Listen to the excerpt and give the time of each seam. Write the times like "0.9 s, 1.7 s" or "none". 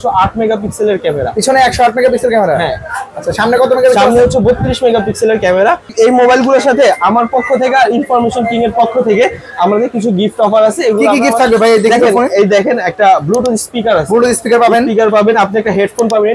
5.9 s